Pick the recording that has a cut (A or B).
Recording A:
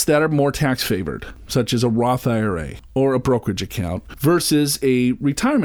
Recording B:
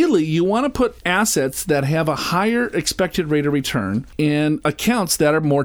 B